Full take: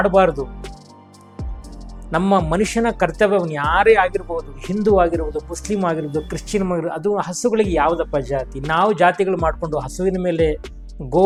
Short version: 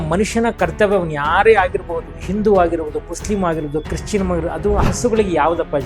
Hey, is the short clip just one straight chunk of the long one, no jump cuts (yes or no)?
yes